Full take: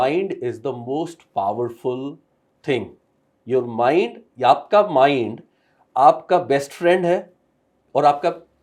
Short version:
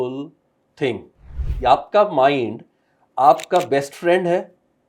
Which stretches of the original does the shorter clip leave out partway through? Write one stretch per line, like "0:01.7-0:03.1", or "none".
0:03.3-0:04.2